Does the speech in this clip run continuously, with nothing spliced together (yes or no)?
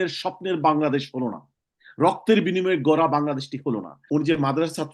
no